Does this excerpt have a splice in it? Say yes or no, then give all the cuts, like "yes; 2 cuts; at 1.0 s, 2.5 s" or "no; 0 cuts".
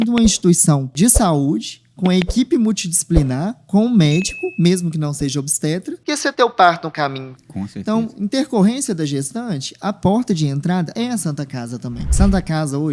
yes; 4 cuts; at 0.9 s, 6.0 s, 10.9 s, 12.1 s